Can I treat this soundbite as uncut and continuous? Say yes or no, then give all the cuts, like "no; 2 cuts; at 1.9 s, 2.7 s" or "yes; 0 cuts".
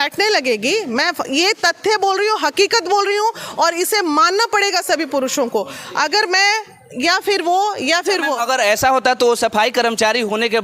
yes; 0 cuts